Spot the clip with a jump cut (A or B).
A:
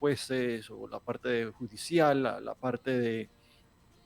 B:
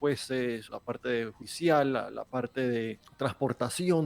B